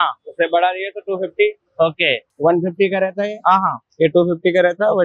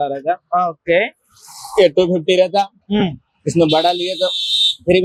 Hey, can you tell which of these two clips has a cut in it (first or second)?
first